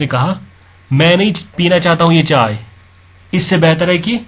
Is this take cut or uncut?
uncut